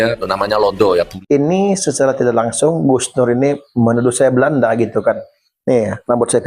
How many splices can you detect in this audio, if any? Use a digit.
1